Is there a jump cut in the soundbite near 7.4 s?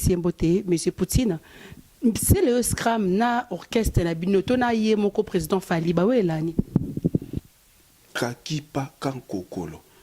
yes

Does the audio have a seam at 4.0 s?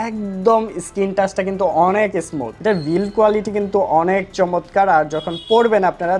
no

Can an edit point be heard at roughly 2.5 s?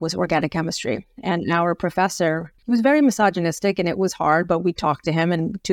yes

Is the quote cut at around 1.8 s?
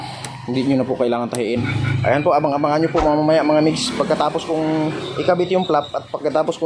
yes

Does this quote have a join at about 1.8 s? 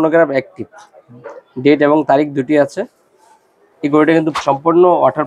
no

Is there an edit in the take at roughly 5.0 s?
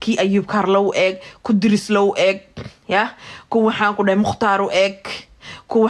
no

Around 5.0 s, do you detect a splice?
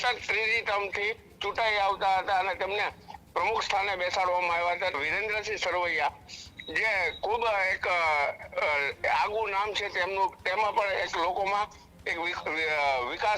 yes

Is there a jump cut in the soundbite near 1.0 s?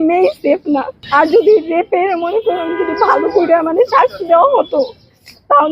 yes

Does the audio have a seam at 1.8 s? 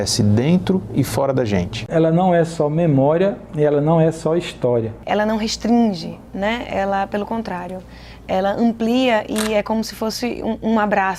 yes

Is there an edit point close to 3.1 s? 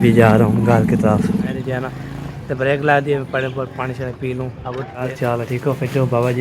no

